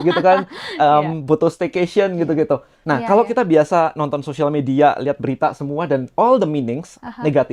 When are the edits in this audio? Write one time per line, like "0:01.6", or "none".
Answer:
0:02.8